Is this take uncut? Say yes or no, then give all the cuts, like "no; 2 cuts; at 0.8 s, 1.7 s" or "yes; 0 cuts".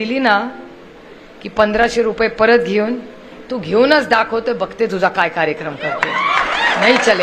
yes; 0 cuts